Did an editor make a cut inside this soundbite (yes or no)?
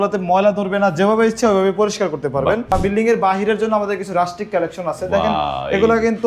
yes